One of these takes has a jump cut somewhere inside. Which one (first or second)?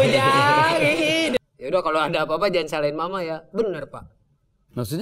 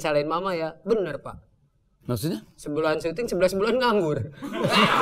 first